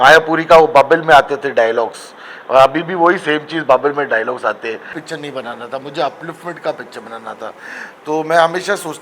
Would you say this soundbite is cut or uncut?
cut